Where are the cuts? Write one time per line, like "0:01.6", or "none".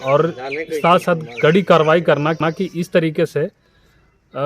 none

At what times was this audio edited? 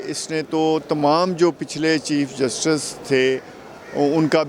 none

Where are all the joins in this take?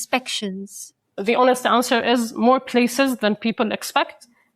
0:01.2

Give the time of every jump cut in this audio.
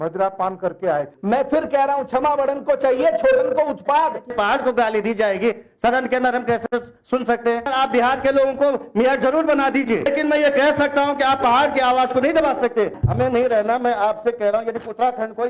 0:01.1
0:04.3
0:07.7
0:10.1
0:13.0

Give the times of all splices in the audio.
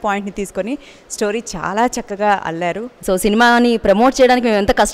0:02.9

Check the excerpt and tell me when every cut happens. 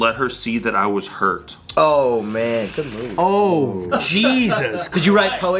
none

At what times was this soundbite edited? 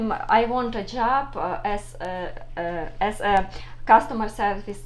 none

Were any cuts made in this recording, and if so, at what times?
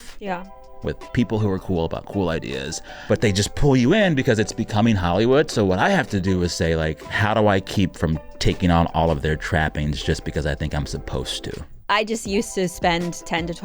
0:03.0
0:07.2
0:11.7

